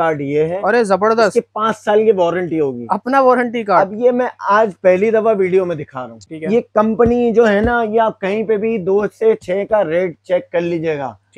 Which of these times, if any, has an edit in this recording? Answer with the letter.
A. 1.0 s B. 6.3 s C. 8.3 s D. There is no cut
B